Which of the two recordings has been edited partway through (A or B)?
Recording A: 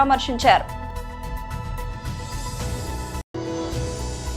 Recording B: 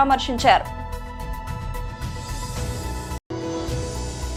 A